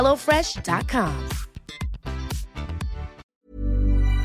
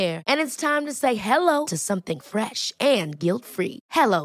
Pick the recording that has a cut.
first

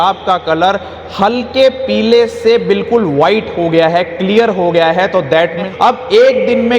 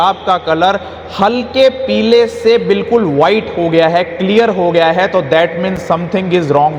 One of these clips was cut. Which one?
first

